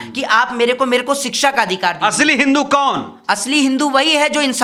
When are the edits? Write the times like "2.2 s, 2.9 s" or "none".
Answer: none